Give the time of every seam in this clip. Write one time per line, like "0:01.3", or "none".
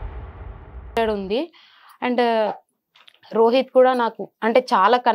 0:01.0